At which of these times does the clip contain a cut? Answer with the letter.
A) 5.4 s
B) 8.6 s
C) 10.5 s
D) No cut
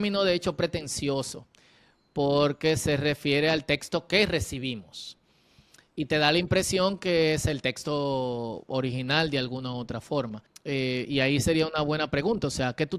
C